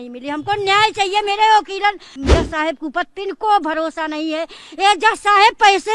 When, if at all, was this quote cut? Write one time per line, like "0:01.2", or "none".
0:02.1